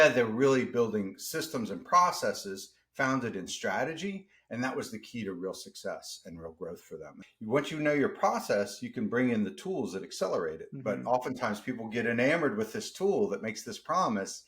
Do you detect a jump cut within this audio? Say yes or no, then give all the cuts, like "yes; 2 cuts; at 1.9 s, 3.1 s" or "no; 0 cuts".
yes; 1 cut; at 7.1 s